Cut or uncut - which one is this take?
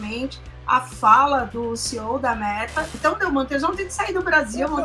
cut